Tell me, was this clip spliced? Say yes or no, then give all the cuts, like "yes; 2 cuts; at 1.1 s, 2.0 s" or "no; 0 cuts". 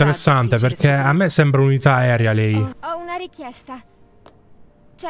yes; 1 cut; at 2.8 s